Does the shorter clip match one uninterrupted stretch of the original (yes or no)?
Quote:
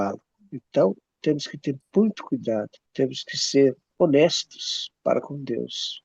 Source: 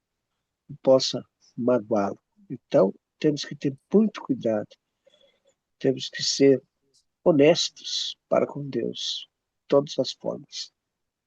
no